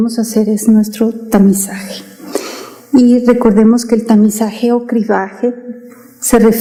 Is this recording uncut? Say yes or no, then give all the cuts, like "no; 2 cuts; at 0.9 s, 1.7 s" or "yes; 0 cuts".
yes; 0 cuts